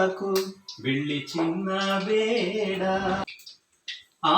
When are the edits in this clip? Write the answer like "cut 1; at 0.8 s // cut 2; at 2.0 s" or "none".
cut 1; at 3.3 s